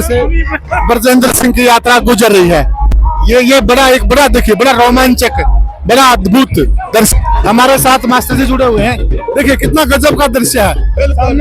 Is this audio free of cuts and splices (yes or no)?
yes